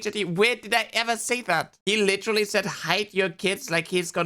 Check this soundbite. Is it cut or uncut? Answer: uncut